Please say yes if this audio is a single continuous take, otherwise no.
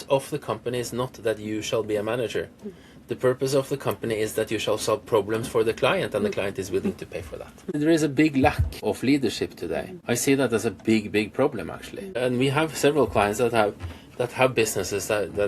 no